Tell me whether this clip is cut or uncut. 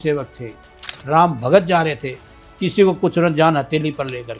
uncut